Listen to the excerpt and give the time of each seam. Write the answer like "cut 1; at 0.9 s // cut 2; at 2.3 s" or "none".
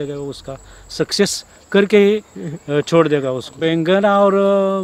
cut 1; at 3.6 s